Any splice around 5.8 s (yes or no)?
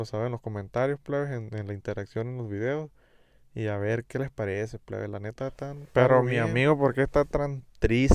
yes